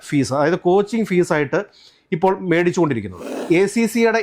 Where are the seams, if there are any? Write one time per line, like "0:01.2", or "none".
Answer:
0:03.3